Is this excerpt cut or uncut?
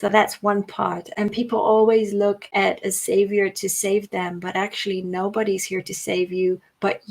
cut